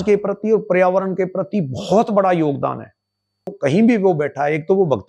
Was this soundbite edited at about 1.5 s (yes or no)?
no